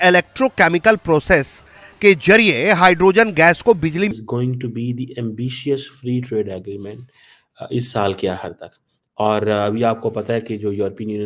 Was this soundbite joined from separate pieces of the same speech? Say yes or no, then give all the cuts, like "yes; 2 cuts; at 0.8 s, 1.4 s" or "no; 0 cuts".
yes; 1 cut; at 4.1 s